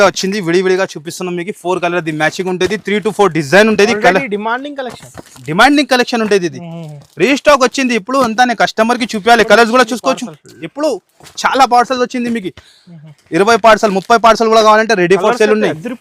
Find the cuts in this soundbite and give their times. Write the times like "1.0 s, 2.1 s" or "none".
none